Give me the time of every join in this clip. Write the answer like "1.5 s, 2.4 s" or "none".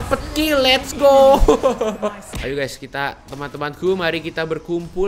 2.2 s